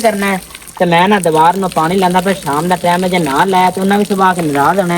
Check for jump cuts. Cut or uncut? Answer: uncut